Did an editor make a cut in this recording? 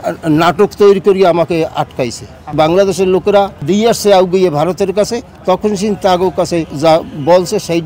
yes; 3 cuts; at 2.5 s, 3.6 s, 6.7 s

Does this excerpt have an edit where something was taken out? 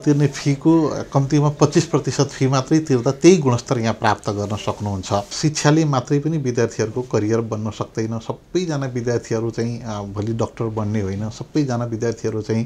yes; 1 cut; at 5.3 s

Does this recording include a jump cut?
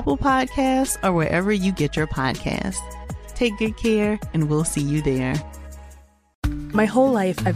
yes; 1 cut; at 6.3 s

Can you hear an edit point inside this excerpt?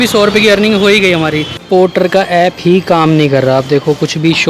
yes; 1 cut; at 1.6 s

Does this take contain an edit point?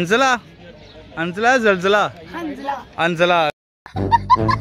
no; 0 cuts

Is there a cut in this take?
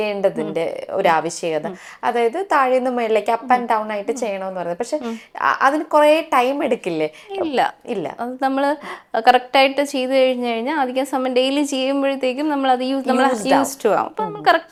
no; 0 cuts

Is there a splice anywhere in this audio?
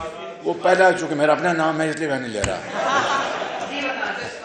no; 0 cuts

